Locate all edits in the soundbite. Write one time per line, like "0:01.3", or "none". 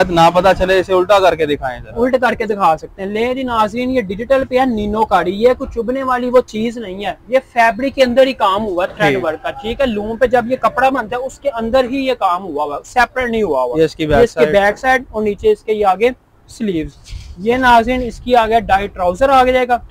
none